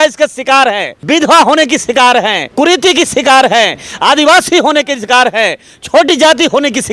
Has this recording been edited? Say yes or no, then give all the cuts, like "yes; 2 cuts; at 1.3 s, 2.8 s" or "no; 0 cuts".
yes; 2 cuts; at 0.9 s, 2.4 s